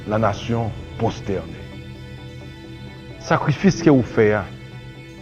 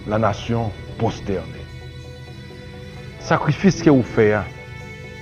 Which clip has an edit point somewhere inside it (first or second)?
first